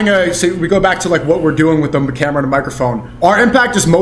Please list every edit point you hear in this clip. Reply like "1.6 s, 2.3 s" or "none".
3.1 s